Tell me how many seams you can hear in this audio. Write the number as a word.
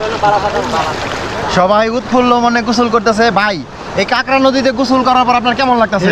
zero